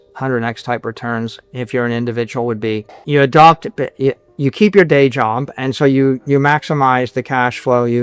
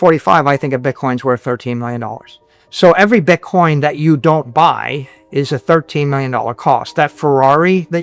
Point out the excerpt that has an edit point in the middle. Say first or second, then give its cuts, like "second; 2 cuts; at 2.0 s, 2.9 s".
first; 1 cut; at 2.9 s